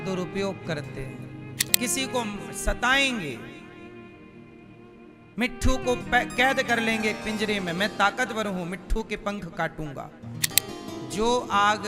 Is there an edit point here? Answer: yes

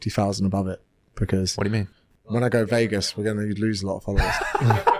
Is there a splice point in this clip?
no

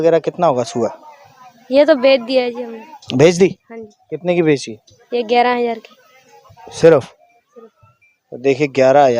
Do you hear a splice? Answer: no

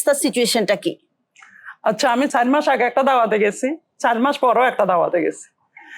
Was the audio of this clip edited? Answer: yes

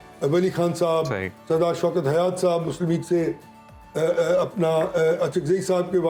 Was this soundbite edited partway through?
no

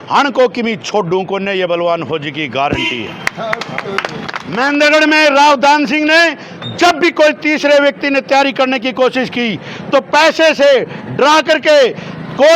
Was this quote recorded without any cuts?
no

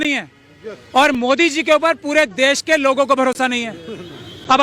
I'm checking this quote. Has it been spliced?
no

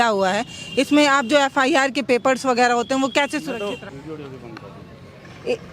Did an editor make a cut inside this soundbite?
yes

